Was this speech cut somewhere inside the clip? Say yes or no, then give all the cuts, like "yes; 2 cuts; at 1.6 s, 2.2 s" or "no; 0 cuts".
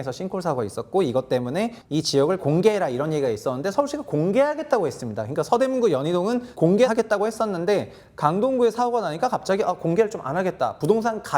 yes; 2 cuts; at 1.8 s, 6.7 s